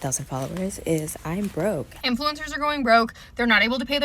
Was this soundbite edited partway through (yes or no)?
yes